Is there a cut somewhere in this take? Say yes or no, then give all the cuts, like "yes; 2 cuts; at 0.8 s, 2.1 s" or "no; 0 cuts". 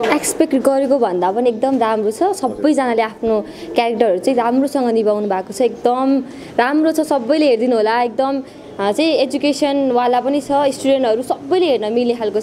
no; 0 cuts